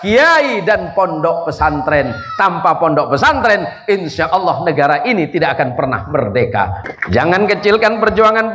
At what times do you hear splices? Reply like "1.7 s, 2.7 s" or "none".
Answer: 6.8 s